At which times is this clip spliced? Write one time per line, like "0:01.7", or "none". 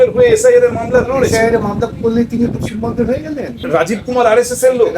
0:03.6